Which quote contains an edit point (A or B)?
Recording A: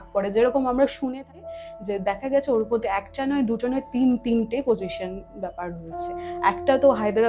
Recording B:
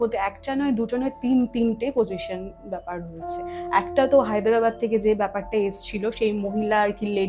A